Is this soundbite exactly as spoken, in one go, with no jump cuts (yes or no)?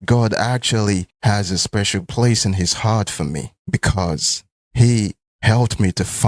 yes